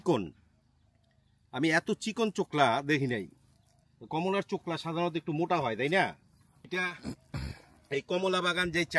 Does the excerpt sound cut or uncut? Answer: cut